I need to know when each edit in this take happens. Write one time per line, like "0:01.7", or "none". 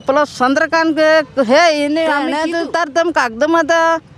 0:02.3